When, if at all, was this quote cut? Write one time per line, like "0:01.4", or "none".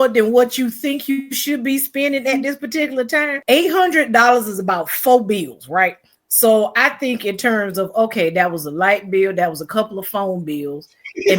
0:03.4